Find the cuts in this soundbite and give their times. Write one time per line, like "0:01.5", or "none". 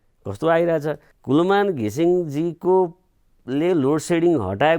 0:01.1